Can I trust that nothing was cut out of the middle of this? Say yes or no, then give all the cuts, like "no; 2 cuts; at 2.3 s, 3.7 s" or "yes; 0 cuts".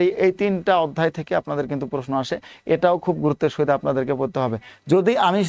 yes; 0 cuts